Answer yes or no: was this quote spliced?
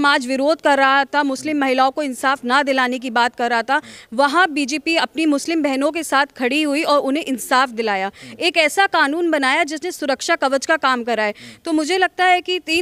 no